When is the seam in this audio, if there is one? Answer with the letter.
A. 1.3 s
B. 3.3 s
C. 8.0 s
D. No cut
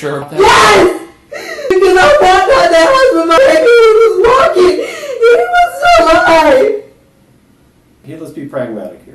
C